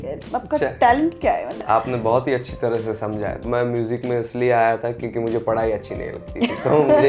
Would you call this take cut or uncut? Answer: cut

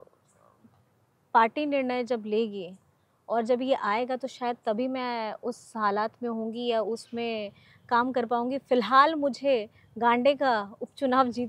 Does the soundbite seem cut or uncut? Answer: uncut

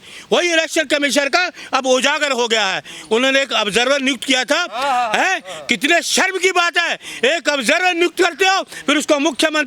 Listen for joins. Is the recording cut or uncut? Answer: uncut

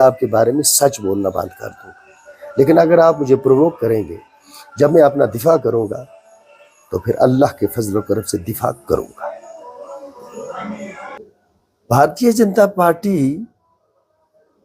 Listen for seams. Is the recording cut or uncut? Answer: cut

